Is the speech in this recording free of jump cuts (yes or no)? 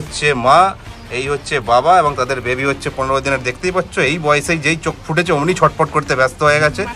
yes